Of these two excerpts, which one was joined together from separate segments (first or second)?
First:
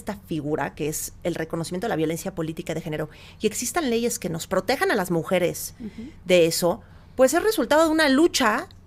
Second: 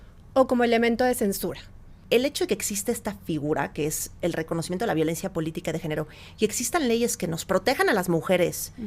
second